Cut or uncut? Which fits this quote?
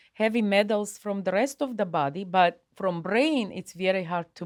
uncut